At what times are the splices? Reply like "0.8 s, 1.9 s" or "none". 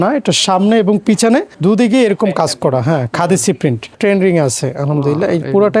1.5 s, 4.0 s